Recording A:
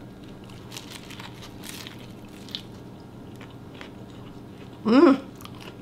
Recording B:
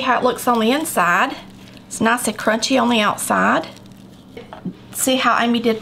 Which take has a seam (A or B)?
B